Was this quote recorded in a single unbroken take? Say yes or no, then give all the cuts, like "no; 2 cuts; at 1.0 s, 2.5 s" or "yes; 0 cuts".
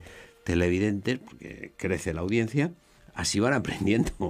yes; 0 cuts